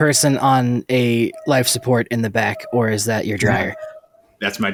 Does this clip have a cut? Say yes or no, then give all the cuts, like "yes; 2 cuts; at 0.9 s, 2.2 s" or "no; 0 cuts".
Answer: no; 0 cuts